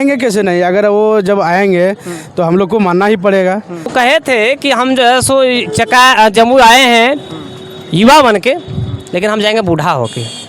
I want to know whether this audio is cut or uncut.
cut